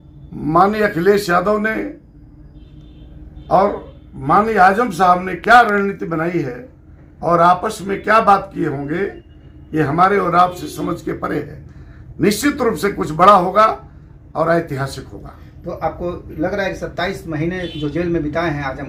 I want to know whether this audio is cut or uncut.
uncut